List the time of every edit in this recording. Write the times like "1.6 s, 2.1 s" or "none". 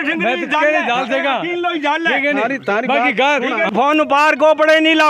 3.7 s